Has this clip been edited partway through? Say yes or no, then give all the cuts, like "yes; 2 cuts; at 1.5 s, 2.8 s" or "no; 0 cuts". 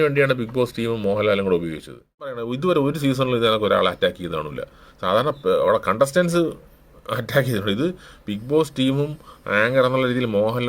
yes; 1 cut; at 2.5 s